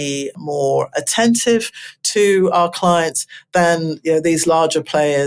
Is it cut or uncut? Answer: uncut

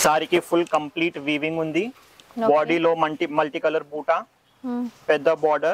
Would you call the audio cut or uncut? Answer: uncut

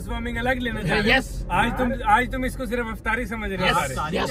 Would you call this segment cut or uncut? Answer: uncut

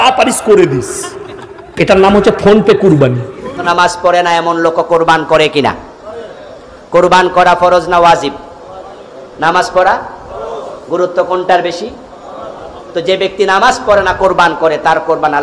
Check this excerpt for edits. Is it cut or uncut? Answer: cut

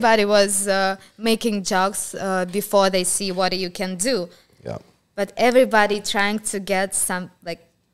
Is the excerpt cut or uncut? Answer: uncut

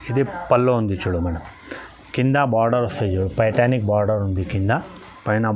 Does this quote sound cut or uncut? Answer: uncut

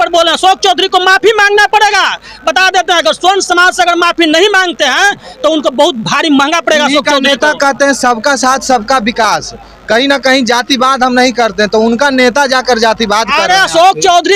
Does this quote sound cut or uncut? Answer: uncut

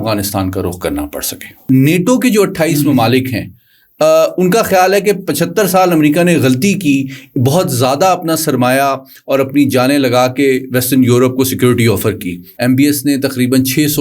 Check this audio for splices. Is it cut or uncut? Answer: cut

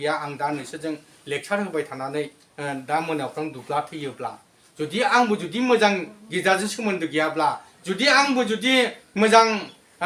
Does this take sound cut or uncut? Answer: uncut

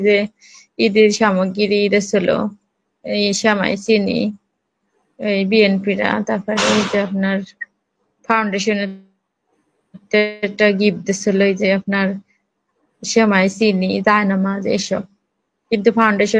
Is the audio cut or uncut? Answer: uncut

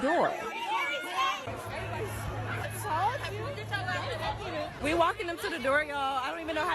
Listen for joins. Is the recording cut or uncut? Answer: uncut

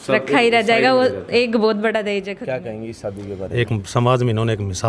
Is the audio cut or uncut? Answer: cut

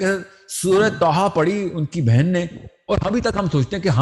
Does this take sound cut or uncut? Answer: uncut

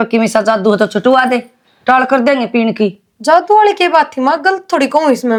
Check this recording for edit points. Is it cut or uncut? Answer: uncut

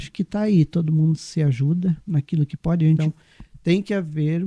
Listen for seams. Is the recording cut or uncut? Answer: cut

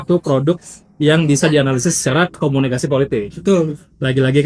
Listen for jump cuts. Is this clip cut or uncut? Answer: uncut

